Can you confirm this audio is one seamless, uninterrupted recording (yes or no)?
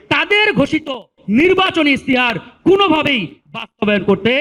yes